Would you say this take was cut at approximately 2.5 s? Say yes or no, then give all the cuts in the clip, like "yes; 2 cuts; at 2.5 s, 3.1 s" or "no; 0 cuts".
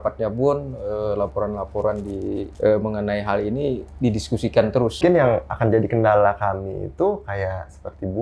yes; 2 cuts; at 2.5 s, 5.0 s